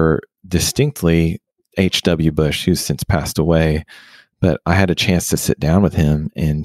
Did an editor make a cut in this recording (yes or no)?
no